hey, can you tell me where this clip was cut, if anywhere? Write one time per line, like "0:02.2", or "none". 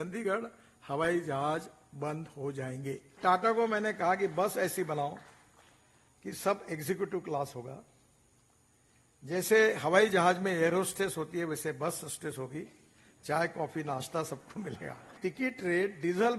0:03.2
0:15.1